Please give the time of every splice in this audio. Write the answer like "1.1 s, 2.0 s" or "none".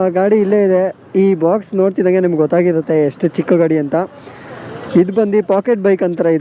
none